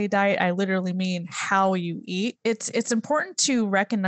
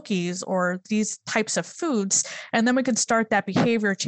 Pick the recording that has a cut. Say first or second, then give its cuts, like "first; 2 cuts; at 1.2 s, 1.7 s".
first; 1 cut; at 2.4 s